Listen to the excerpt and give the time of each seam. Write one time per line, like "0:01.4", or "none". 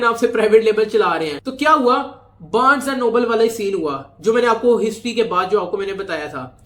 none

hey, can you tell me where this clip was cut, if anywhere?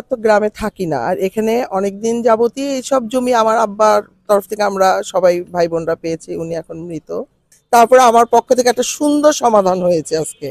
0:07.5

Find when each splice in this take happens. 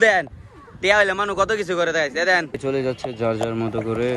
0:02.5

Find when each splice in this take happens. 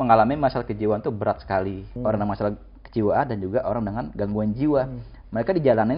0:01.8

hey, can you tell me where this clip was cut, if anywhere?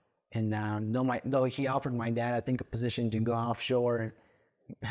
none

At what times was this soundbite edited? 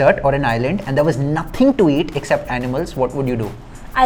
none

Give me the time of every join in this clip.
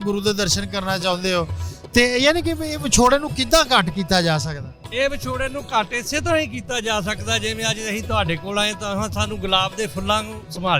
none

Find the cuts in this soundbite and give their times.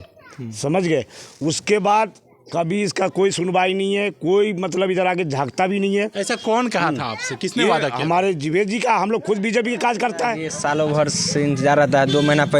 0:10.5

